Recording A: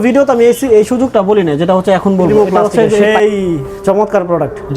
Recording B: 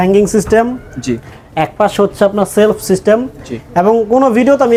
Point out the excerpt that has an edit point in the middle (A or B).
A